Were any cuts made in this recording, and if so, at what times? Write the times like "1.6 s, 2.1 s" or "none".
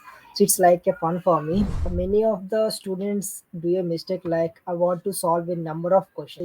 1.8 s